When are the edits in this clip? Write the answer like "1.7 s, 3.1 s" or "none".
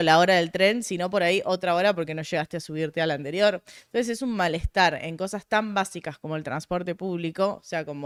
none